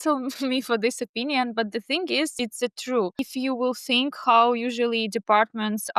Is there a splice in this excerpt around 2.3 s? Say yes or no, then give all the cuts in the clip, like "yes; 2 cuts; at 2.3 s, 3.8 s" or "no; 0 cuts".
yes; 2 cuts; at 2.3 s, 3.2 s